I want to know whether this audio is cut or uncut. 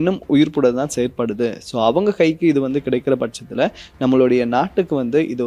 uncut